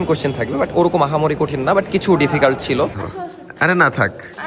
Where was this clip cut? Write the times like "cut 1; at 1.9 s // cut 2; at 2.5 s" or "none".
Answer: cut 1; at 3.1 s